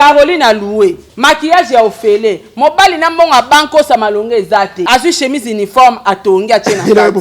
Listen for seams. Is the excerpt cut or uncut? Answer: cut